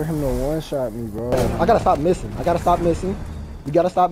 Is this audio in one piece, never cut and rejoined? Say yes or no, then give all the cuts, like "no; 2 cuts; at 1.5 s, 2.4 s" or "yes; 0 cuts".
no; 1 cut; at 1.5 s